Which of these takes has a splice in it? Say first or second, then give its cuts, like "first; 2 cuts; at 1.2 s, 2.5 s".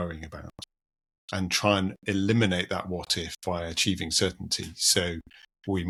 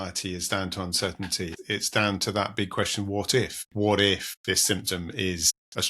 second; 3 cuts; at 1.6 s, 3.6 s, 4.3 s